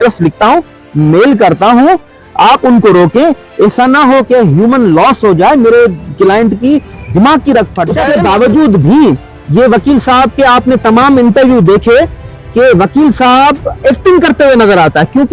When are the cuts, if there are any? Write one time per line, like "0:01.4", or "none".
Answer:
0:08.0